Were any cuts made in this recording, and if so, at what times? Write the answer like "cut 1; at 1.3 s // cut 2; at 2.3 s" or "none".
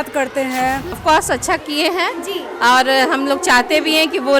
cut 1; at 1.0 s